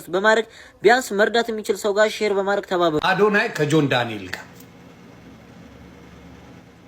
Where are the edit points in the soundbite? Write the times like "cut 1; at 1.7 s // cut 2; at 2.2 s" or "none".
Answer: cut 1; at 3.0 s